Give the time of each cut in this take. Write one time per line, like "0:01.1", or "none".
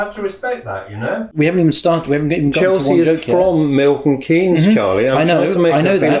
0:01.4